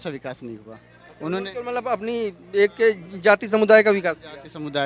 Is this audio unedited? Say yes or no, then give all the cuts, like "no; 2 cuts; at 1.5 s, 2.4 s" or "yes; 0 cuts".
yes; 0 cuts